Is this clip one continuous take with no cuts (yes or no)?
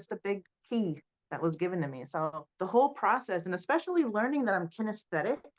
yes